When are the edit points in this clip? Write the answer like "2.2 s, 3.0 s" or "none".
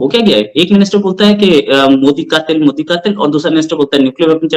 none